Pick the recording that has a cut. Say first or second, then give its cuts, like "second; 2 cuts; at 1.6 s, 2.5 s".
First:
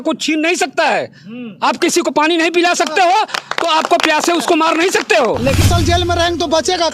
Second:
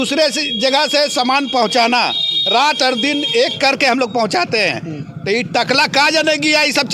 first; 1 cut; at 5.7 s